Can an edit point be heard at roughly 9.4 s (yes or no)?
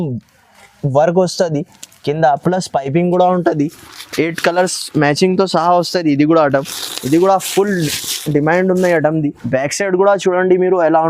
yes